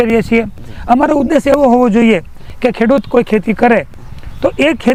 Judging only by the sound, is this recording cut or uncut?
uncut